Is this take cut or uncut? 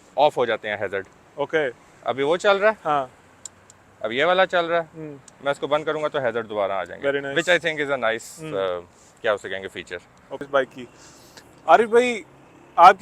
cut